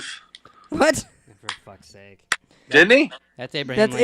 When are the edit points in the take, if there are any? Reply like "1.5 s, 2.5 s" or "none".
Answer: 2.5 s